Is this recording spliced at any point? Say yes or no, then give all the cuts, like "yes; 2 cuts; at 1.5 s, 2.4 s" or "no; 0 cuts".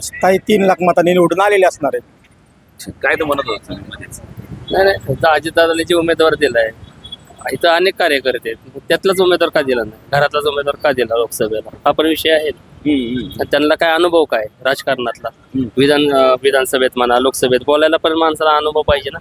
no; 0 cuts